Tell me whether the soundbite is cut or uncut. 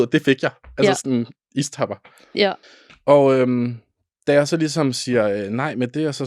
cut